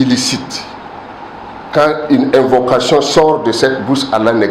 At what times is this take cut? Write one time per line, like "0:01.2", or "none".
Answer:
none